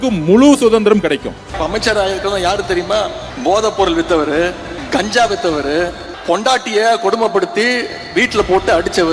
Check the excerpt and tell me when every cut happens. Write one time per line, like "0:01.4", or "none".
0:01.5
0:03.3
0:04.7
0:06.1